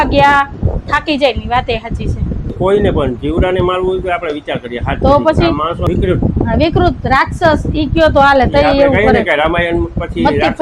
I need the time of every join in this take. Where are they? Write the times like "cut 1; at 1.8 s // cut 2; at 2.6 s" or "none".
cut 1; at 2.5 s // cut 2; at 5.8 s